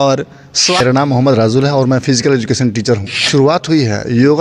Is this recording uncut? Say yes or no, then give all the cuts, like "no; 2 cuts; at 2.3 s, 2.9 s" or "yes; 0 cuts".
no; 2 cuts; at 0.8 s, 3.1 s